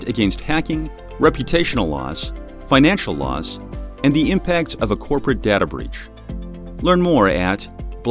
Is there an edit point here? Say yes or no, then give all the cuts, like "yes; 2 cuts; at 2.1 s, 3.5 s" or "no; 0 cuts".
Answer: no; 0 cuts